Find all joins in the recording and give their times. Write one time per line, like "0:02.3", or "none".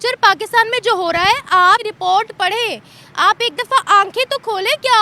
0:01.9